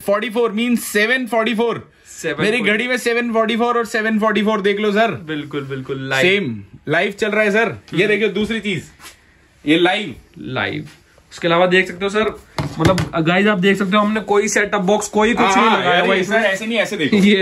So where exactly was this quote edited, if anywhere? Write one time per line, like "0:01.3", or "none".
none